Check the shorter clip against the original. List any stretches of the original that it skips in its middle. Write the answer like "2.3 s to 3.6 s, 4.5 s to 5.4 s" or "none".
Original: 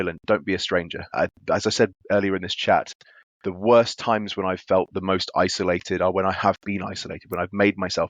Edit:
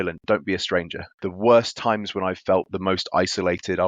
1.0 s to 3.2 s